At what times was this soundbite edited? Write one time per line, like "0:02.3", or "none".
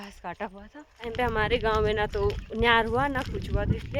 0:01.1